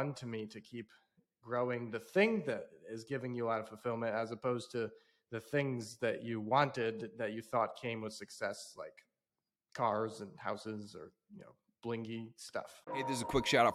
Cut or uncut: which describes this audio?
cut